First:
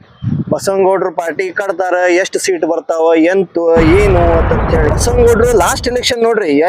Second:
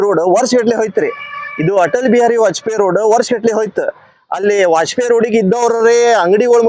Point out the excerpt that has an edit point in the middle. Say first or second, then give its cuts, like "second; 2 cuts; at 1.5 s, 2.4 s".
first; 1 cut; at 4.9 s